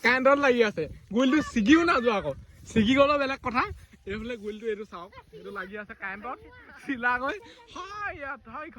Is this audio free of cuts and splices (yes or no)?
yes